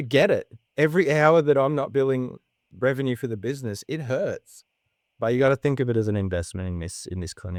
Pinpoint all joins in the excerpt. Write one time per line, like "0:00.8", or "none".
none